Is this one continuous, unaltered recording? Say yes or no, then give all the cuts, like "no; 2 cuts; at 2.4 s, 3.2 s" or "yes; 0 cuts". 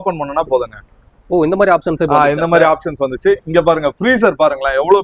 yes; 0 cuts